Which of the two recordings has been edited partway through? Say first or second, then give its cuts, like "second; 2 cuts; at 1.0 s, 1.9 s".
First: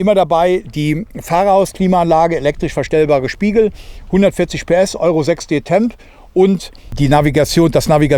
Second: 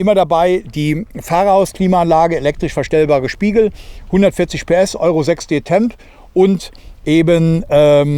first; 1 cut; at 6.9 s